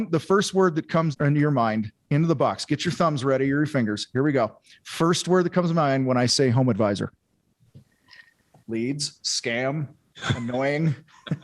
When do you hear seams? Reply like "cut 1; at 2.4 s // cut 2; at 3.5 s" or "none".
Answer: cut 1; at 1.1 s // cut 2; at 8.6 s

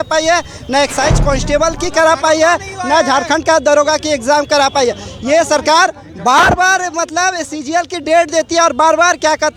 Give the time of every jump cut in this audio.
none

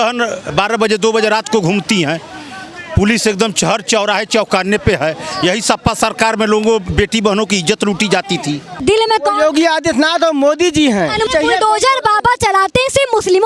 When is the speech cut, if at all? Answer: cut 1; at 8.8 s // cut 2; at 11.3 s

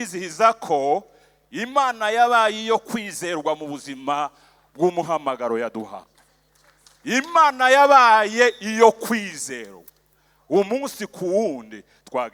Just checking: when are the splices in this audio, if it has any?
none

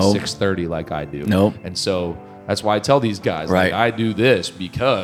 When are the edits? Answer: cut 1; at 1.2 s

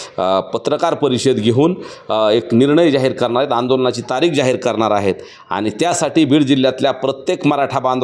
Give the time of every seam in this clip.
none

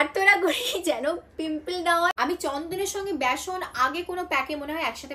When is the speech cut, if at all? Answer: cut 1; at 2.1 s

